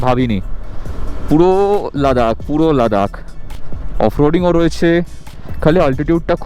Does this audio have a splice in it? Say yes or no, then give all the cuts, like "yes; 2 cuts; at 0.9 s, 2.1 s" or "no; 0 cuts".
no; 0 cuts